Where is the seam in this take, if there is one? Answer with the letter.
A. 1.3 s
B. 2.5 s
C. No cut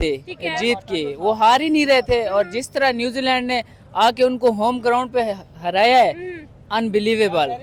C